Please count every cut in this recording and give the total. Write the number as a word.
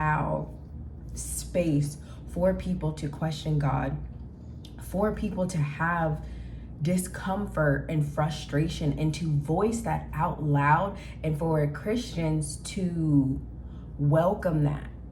zero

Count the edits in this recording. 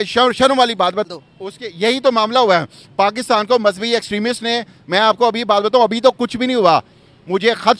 one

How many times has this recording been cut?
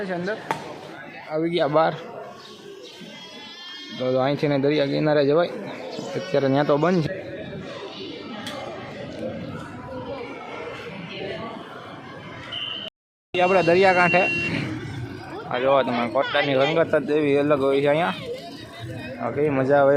two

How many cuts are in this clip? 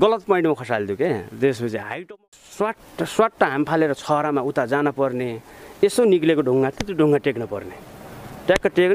one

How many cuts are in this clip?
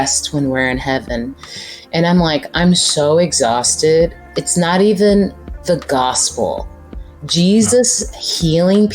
two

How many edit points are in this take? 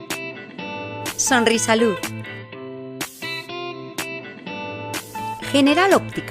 zero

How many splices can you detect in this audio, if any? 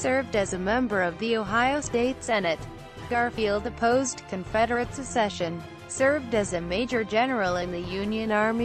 one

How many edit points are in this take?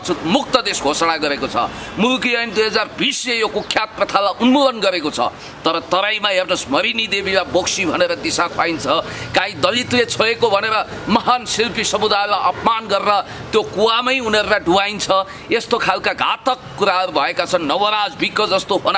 zero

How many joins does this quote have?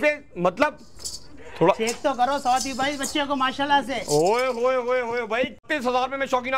one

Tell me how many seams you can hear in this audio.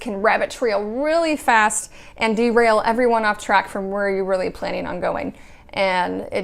zero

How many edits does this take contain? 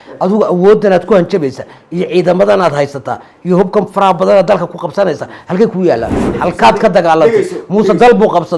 one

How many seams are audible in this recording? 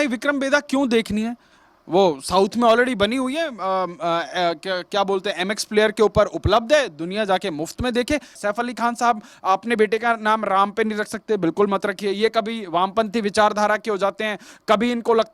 one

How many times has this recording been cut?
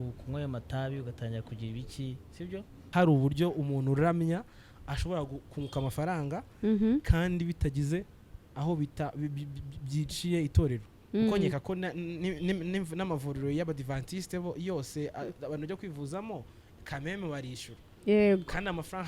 one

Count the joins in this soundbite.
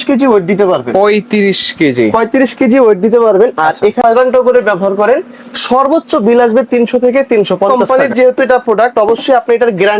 two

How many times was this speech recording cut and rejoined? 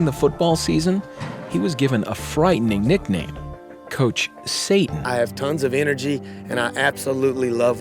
one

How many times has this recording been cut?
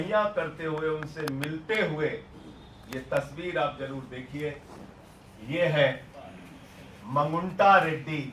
zero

